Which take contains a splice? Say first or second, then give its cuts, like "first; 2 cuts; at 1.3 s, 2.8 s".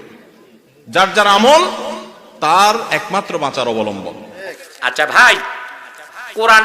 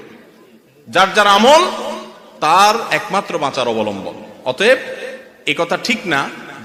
first; 1 cut; at 4.2 s